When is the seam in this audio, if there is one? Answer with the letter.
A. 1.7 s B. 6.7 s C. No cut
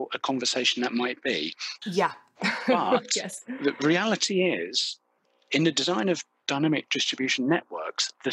A